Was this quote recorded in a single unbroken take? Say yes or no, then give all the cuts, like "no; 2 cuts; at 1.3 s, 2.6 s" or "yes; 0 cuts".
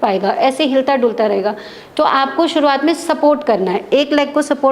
yes; 0 cuts